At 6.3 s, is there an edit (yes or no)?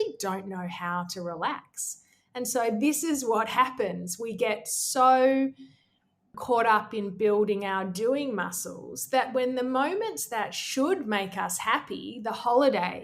yes